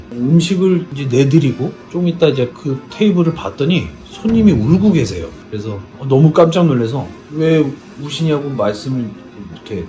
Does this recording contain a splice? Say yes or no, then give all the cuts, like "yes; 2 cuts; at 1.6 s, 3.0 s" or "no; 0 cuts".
no; 0 cuts